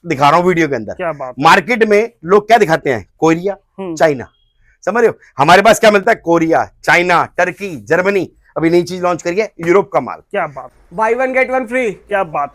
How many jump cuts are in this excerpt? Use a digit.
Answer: 1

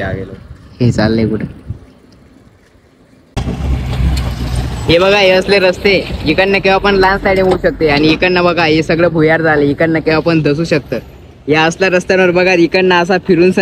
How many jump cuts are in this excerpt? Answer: 1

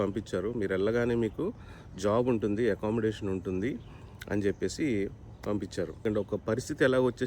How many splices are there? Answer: 1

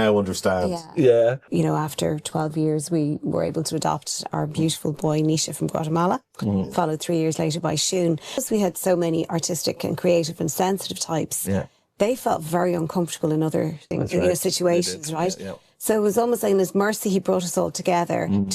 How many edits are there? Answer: 3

